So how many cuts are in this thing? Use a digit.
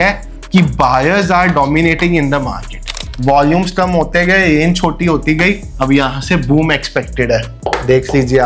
3